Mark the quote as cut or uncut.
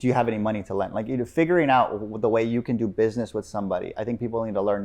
uncut